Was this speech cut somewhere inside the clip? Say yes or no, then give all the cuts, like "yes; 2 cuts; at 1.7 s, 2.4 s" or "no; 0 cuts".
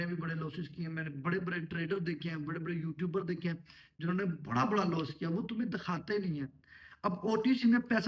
no; 0 cuts